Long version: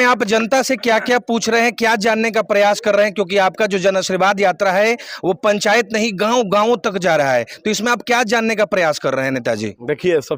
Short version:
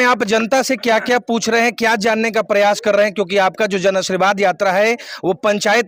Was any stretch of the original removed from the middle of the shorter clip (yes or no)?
no